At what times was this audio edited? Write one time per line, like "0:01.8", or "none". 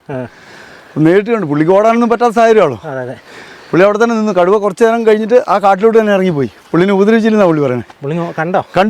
none